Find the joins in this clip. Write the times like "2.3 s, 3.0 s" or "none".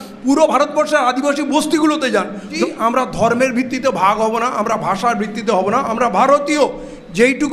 2.5 s

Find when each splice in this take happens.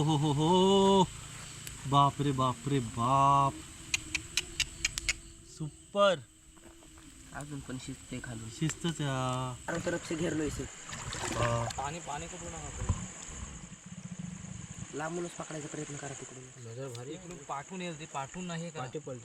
9.7 s

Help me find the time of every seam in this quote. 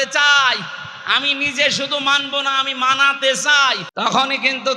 3.9 s

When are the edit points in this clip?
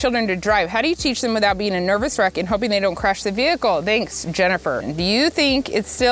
4.8 s

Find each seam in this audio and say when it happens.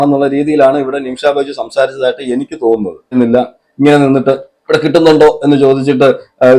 3.1 s

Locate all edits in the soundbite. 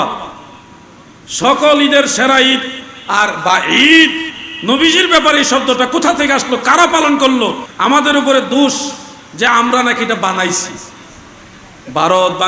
7.6 s

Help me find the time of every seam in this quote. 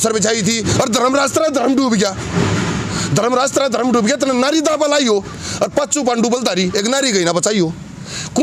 none

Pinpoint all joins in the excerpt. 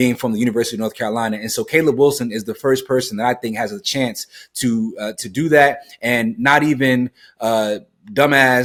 none

